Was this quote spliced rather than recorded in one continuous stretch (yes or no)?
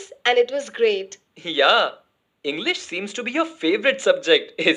no